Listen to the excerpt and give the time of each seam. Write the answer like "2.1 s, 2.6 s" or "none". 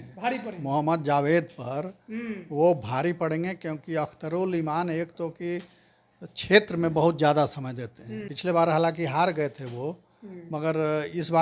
8.3 s